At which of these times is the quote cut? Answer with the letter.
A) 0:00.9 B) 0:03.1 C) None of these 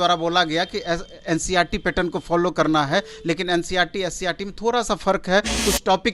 C